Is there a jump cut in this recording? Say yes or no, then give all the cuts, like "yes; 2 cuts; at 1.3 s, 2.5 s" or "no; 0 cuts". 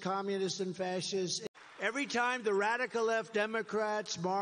yes; 1 cut; at 1.4 s